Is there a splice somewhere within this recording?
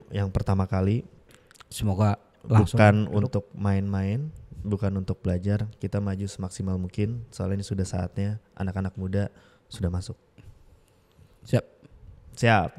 no; 0 cuts

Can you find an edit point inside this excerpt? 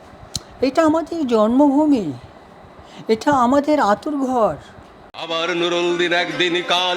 yes; 1 cut; at 5.2 s

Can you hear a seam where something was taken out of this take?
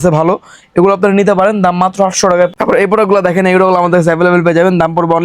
yes; 1 cut; at 2.5 s

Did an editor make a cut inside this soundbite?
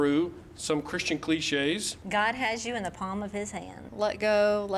yes; 1 cut; at 1.9 s

